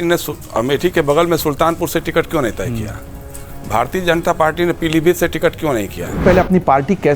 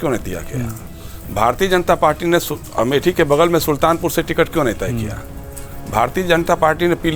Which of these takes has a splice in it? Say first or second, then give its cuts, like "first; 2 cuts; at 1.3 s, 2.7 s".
first; 1 cut; at 6.2 s